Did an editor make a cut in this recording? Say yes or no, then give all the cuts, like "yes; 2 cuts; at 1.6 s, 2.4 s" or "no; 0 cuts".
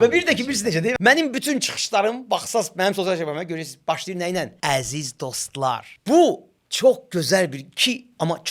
yes; 3 cuts; at 0.9 s, 4.5 s, 5.9 s